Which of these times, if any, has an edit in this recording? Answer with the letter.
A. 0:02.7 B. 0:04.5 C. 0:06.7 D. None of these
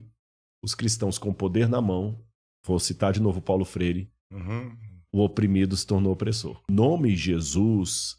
C